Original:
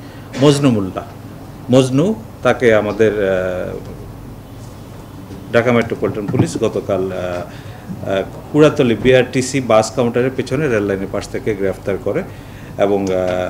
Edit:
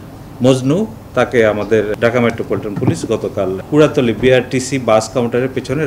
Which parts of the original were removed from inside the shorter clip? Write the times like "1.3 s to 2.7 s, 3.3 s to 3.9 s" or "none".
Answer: 3.2 s to 5.4 s, 7.1 s to 8.4 s